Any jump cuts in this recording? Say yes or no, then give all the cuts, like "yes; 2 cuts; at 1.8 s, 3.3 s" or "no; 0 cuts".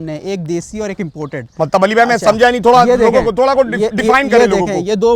no; 0 cuts